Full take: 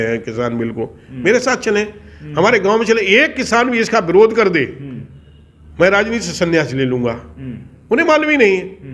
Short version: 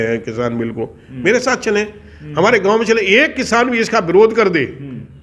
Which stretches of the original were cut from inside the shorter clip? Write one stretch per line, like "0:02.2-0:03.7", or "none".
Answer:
none